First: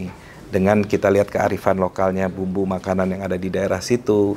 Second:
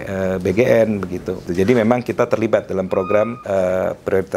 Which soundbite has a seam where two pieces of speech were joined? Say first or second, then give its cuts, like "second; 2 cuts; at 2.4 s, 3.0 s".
second; 2 cuts; at 1.5 s, 3.4 s